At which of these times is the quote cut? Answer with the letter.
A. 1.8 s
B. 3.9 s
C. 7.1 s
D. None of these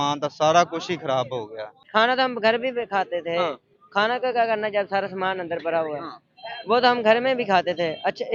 A